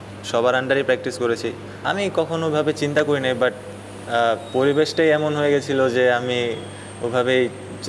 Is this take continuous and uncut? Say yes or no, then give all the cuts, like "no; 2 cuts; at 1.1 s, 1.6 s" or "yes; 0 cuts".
no; 1 cut; at 1.7 s